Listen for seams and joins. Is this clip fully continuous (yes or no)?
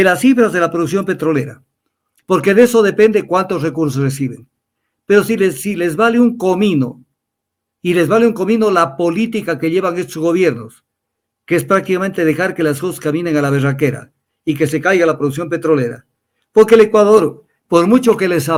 yes